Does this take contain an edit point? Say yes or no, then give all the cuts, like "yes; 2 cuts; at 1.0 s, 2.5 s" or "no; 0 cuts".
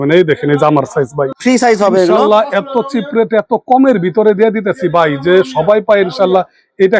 no; 0 cuts